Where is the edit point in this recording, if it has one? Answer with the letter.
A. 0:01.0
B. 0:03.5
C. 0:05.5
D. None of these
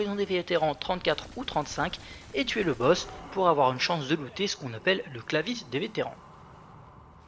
B